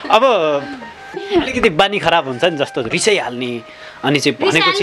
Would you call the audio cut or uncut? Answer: cut